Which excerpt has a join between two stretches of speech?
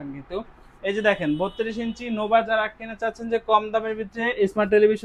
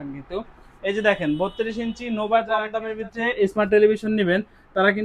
second; 1 cut; at 2.7 s

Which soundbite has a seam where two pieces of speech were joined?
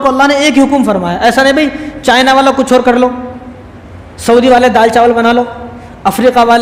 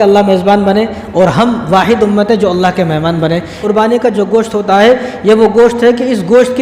second; 1 cut; at 3.6 s

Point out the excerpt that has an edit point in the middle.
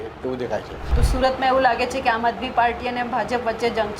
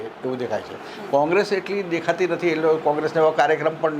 first; 1 cut; at 1.0 s

